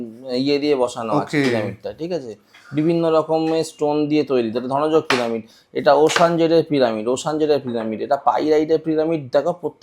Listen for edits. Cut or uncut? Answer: uncut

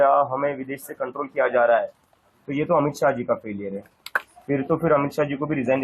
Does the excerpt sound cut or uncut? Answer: uncut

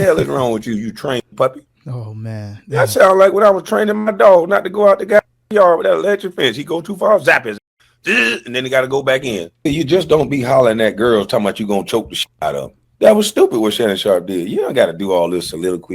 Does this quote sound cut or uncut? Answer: cut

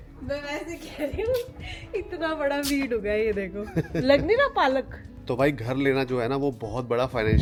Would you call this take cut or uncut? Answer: uncut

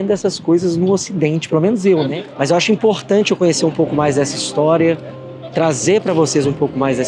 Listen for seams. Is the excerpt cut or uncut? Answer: cut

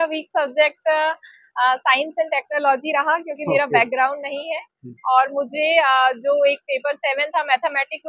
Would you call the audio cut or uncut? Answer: uncut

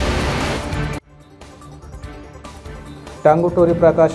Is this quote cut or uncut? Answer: uncut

